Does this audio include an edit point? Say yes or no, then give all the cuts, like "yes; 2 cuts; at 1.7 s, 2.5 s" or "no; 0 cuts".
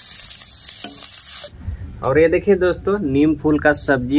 yes; 1 cut; at 1.3 s